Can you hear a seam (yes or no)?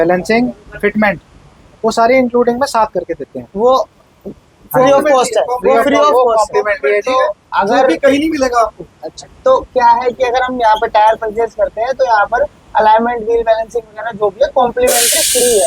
no